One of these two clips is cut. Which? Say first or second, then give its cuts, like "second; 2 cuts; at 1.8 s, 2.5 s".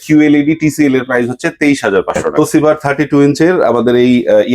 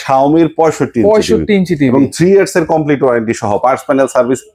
first; 1 cut; at 2.3 s